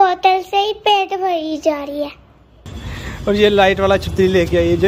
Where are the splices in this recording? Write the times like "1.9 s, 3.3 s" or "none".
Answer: 2.9 s